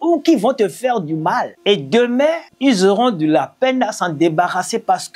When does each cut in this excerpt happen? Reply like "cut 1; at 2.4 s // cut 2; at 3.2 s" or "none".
cut 1; at 1.5 s // cut 2; at 2.5 s